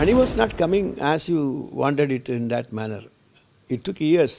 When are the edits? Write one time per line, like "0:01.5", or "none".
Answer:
none